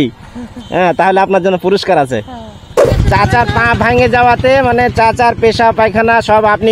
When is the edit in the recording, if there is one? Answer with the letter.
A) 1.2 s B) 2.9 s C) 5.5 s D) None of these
B